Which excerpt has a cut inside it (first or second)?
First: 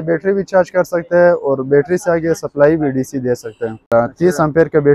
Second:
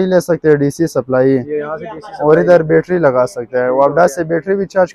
first